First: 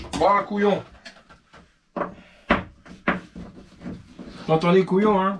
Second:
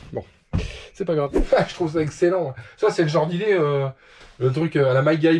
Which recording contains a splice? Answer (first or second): second